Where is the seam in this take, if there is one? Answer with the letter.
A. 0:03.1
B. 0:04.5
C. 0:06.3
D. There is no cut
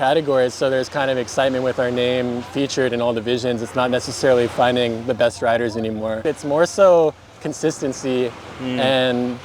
C